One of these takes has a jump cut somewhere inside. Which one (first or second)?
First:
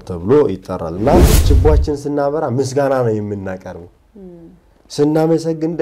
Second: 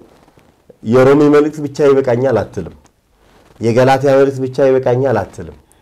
first